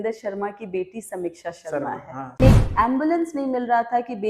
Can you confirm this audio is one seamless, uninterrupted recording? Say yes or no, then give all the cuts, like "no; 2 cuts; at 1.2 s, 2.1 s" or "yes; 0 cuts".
no; 1 cut; at 2.4 s